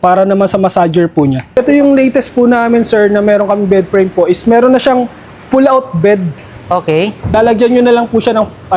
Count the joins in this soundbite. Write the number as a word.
two